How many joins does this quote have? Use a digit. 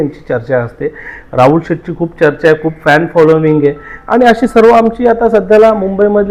0